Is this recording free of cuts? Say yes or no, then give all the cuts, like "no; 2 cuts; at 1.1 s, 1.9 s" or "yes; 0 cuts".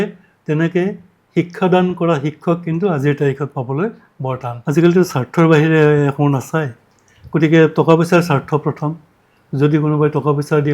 no; 1 cut; at 4.5 s